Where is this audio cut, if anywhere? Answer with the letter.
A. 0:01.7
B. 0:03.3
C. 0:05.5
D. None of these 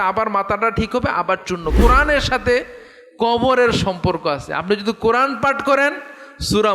A